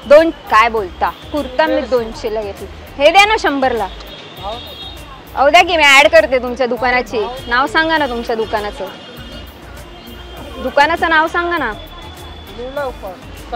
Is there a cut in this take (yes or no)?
no